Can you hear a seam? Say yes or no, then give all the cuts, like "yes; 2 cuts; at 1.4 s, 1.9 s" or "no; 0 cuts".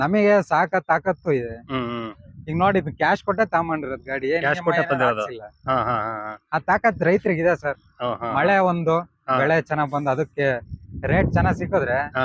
no; 0 cuts